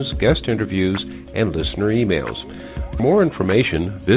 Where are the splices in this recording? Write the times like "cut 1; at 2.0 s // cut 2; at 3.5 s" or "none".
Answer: cut 1; at 3.0 s